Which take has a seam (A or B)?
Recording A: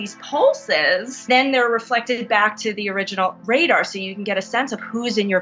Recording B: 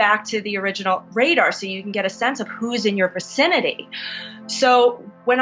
A